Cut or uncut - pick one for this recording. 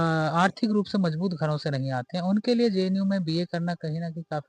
uncut